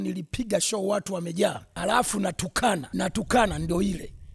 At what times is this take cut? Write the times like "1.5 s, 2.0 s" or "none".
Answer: 1.7 s, 2.9 s